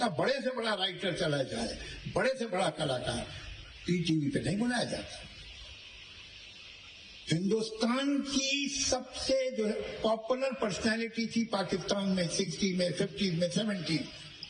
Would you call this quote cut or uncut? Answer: uncut